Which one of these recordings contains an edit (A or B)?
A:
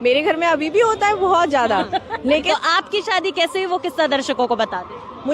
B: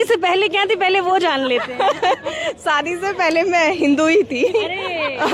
A